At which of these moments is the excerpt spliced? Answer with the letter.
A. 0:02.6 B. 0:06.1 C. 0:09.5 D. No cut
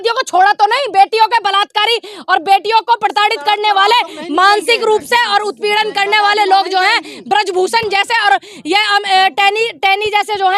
D